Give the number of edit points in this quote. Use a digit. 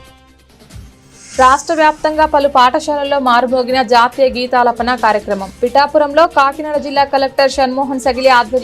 1